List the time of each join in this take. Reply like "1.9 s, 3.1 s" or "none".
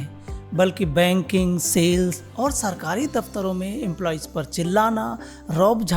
none